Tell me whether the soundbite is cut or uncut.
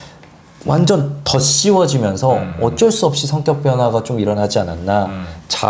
uncut